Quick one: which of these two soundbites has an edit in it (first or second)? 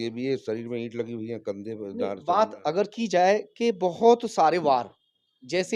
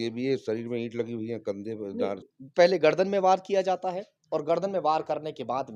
second